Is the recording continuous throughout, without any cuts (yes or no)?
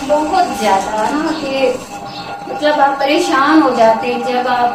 yes